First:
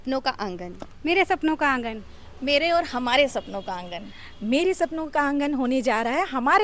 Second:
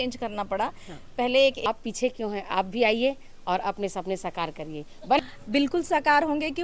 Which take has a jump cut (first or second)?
second